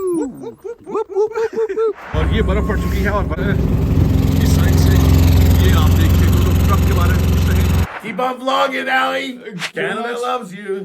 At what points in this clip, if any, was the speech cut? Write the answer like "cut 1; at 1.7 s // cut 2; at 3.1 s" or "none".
cut 1; at 2.1 s // cut 2; at 3.4 s // cut 3; at 7.9 s // cut 4; at 9.6 s